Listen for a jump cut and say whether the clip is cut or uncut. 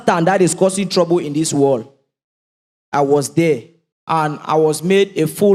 uncut